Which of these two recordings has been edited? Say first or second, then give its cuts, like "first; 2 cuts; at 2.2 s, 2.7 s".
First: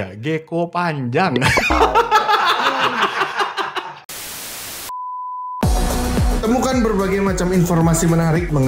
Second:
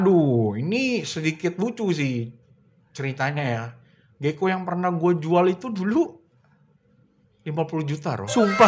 first; 2 cuts; at 4.0 s, 5.6 s